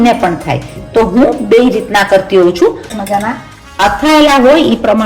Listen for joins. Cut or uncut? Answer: cut